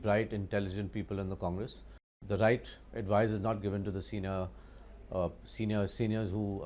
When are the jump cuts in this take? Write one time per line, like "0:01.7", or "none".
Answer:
0:02.1